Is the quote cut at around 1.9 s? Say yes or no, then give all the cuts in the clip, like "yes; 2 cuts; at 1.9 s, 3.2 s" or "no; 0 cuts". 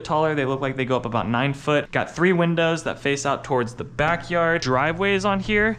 yes; 2 cuts; at 1.9 s, 4.6 s